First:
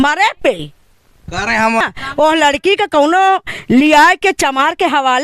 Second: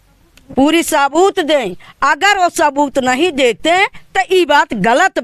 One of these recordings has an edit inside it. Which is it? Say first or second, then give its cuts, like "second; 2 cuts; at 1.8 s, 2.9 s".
first; 1 cut; at 1.8 s